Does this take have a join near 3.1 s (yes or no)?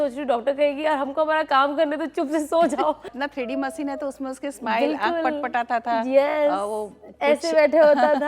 yes